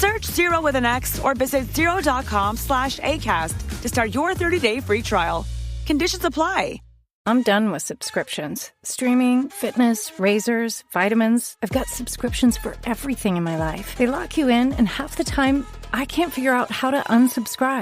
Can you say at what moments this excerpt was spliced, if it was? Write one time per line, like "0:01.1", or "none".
0:07.1